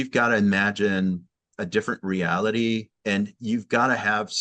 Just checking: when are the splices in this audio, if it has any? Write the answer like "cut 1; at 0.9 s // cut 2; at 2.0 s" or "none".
cut 1; at 1.5 s // cut 2; at 2.9 s